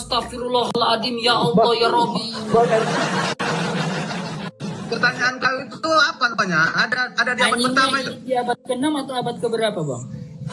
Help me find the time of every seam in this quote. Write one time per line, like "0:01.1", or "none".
0:04.4